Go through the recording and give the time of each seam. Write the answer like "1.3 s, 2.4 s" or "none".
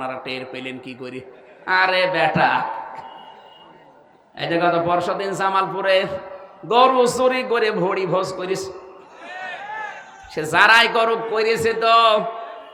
none